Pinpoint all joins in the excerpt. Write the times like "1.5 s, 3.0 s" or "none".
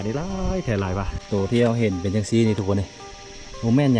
1.5 s

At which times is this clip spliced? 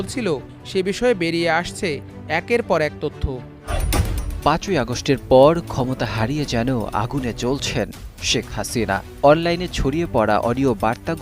3.7 s

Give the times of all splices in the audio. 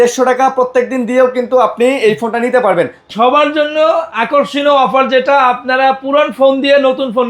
3.0 s

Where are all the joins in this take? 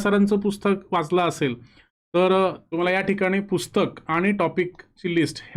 2.6 s

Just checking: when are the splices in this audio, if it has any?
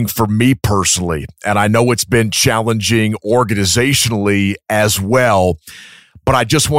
none

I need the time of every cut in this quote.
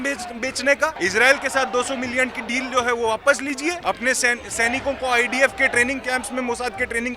0.9 s, 3.8 s

